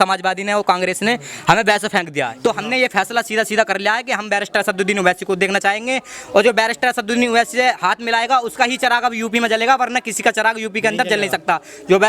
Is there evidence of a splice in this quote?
yes; 1 cut; at 2.3 s

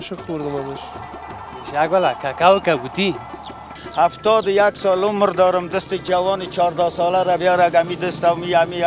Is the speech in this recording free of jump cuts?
no; 1 cut; at 3.8 s

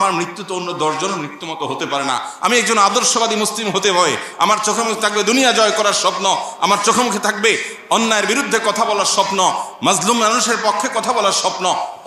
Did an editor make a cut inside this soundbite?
yes; 1 cut; at 4.3 s

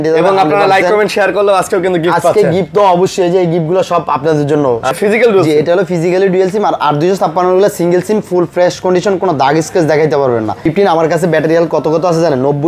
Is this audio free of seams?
no; 2 cuts; at 4.9 s, 10.6 s

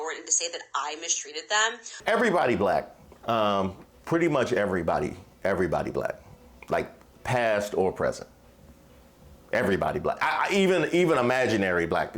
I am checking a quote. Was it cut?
yes; 1 cut; at 2.0 s

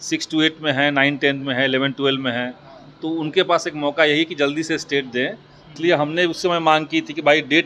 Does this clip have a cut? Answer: yes; 1 cut; at 5.7 s

